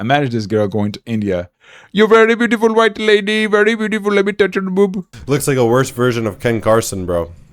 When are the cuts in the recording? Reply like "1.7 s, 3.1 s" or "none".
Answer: 5.1 s